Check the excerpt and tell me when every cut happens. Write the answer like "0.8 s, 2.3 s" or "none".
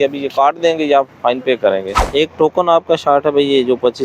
2.0 s